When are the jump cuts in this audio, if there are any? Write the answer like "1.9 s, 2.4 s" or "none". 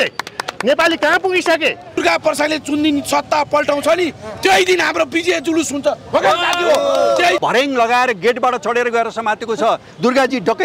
2.0 s, 7.4 s